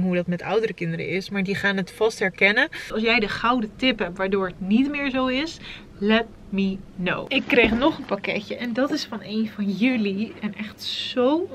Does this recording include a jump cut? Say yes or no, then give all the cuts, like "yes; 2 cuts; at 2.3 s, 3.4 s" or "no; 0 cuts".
yes; 2 cuts; at 2.8 s, 7.2 s